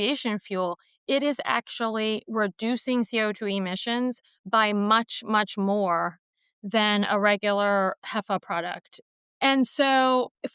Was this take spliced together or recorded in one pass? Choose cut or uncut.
cut